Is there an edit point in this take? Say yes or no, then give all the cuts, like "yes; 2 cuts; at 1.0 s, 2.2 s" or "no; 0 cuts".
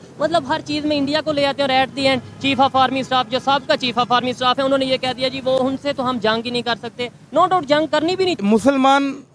yes; 1 cut; at 8.4 s